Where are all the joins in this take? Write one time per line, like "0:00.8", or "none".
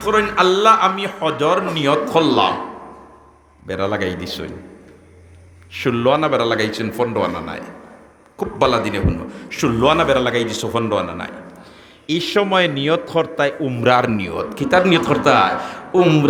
none